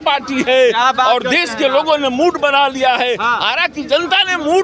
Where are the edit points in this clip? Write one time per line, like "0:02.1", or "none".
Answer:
none